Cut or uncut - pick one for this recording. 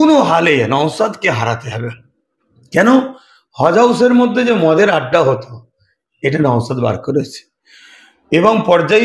uncut